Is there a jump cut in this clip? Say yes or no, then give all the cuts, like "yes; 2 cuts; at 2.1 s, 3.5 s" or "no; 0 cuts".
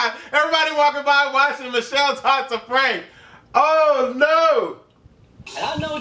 no; 0 cuts